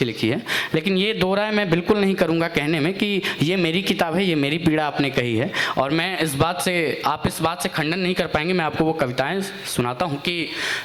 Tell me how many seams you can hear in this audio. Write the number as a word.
zero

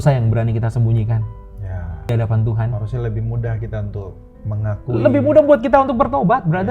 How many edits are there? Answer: one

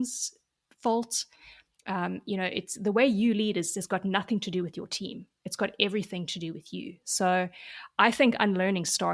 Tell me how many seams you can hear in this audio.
zero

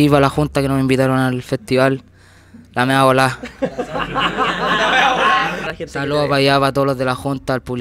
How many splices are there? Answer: one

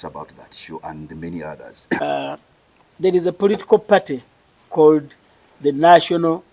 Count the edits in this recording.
one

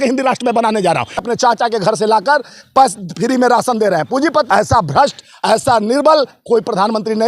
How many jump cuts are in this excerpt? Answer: two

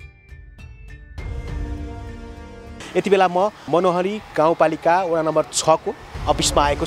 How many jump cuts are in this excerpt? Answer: two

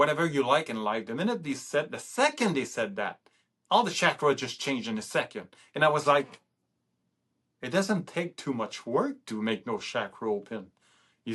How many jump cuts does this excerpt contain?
zero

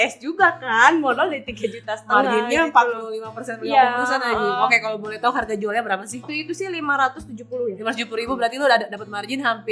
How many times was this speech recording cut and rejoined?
one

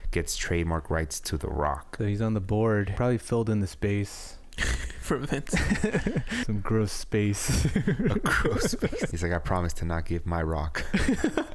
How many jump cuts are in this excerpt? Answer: four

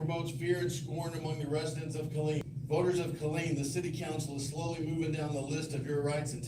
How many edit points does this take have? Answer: one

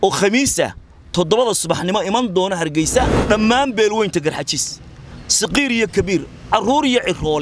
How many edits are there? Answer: one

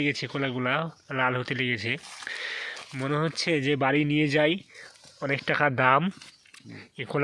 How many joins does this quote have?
zero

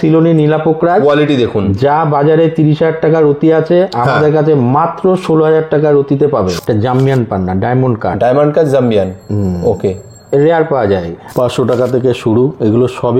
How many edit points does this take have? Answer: two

